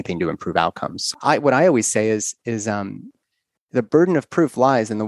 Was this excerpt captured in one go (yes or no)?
no